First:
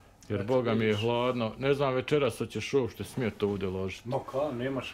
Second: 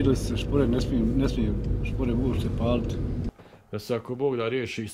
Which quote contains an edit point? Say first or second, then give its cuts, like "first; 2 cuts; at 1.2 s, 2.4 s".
second; 1 cut; at 3.3 s